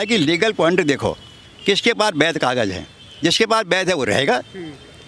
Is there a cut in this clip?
no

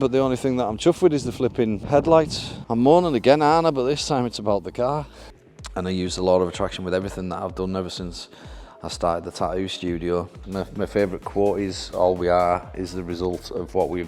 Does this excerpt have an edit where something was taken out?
yes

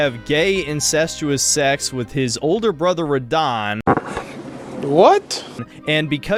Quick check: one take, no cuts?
yes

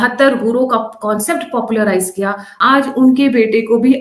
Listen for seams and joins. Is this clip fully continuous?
no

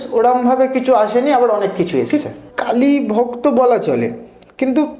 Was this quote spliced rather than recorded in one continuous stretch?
yes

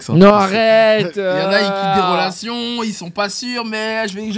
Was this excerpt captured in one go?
yes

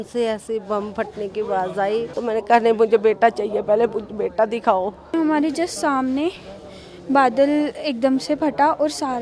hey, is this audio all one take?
no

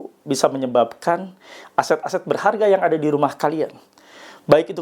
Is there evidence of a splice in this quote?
no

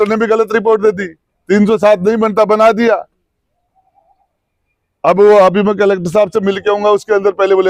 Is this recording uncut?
yes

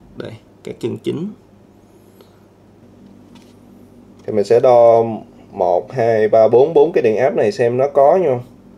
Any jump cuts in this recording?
yes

